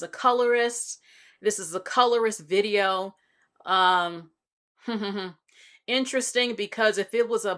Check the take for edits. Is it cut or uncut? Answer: uncut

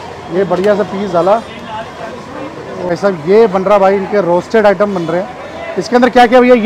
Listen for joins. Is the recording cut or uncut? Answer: cut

